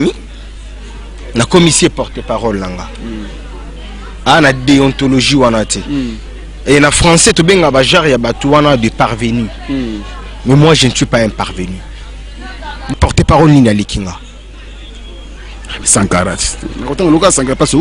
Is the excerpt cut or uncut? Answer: cut